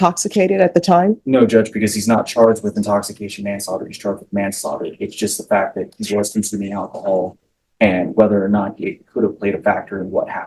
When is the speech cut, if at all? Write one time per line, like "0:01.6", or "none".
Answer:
none